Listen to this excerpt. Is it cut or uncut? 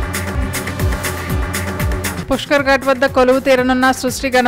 uncut